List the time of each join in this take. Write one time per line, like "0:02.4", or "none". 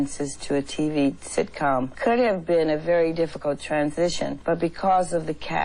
0:01.9
0:04.4